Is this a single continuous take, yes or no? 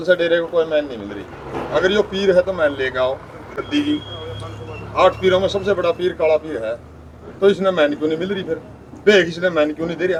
yes